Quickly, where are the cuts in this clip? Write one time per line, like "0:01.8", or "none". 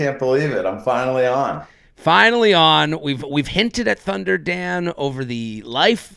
none